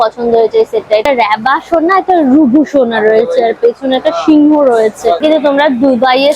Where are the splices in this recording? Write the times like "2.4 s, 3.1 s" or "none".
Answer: 1.1 s, 5.1 s